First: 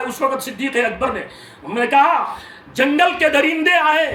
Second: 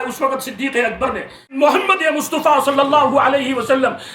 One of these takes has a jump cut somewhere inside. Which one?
second; 1 cut; at 1.6 s

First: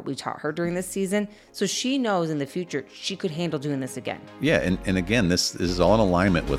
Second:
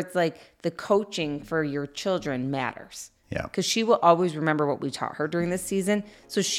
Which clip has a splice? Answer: second; 1 cut; at 3.5 s

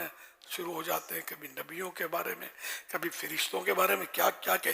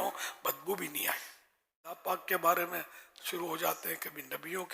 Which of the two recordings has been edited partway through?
second; 1 cut; at 1.7 s

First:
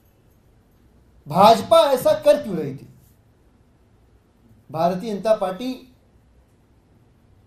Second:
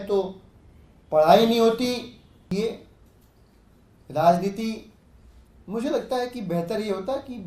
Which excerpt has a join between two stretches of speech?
second; 1 cut; at 2.5 s

